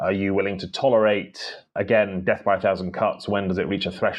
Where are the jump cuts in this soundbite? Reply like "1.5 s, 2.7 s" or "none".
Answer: none

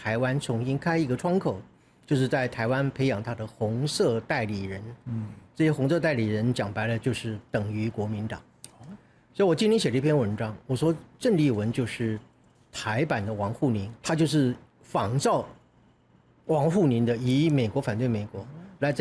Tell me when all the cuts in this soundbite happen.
13.9 s

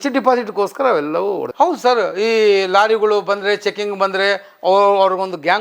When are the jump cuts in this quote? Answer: 1.5 s

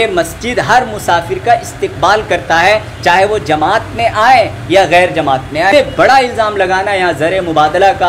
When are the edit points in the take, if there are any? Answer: 5.7 s

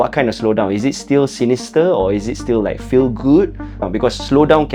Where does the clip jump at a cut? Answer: 3.8 s

